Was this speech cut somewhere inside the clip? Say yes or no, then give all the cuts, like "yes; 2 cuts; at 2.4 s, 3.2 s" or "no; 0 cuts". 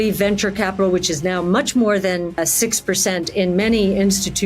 yes; 1 cut; at 2.4 s